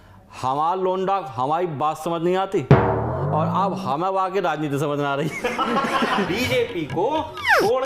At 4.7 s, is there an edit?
no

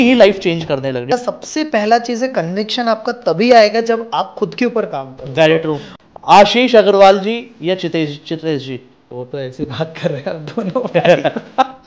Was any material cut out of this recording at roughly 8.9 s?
no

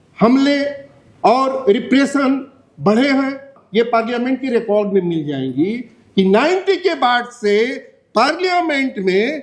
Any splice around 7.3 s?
no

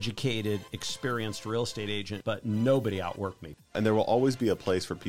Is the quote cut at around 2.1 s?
yes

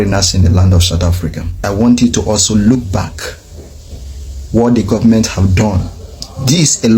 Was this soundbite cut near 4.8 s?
no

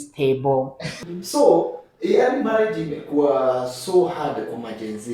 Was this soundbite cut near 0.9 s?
yes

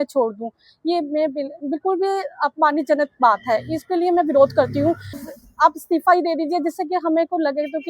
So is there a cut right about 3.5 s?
no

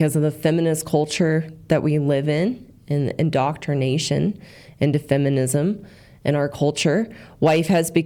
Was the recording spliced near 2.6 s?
no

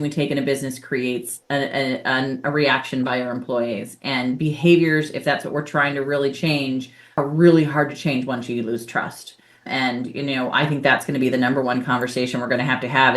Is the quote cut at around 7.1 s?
yes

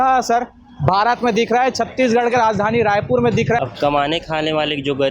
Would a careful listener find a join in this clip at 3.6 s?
yes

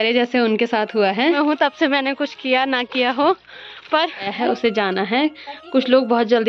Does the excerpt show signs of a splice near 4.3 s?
yes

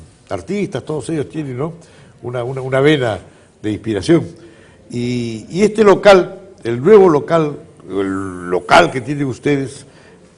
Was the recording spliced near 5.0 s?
yes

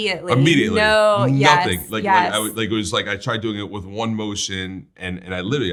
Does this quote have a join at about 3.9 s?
no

